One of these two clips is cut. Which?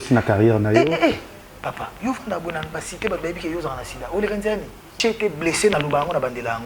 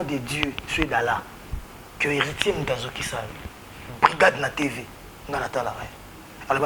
first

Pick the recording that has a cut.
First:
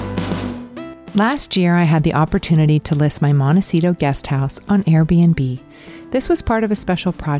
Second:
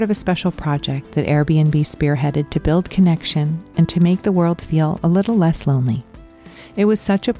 first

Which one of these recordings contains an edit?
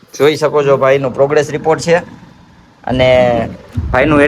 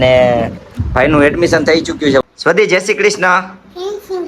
second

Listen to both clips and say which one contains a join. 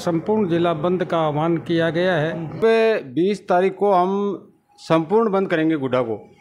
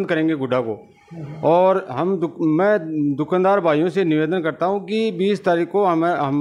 first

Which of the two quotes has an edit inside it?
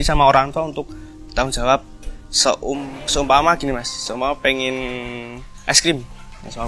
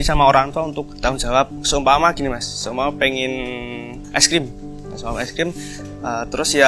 second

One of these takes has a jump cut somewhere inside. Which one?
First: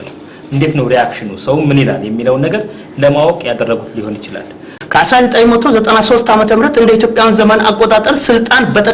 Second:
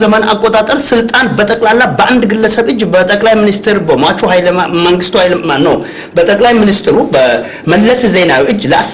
first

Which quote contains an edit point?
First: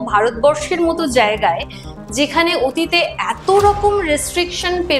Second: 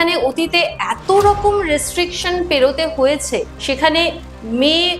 second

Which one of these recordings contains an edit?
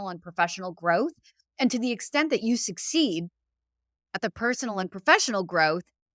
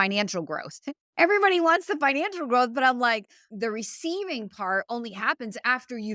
second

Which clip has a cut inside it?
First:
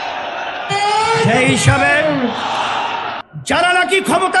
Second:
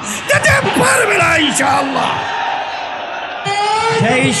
first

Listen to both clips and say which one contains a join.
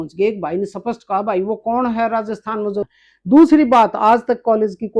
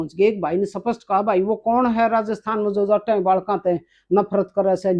first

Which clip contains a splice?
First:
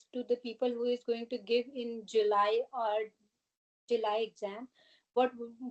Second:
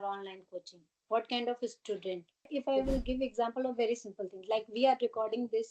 second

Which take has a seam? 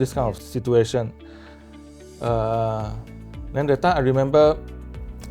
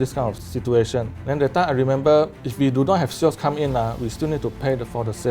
second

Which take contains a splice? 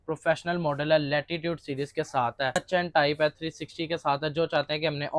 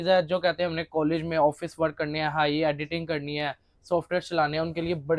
first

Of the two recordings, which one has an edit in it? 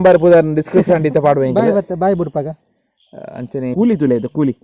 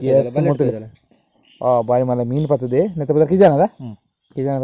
first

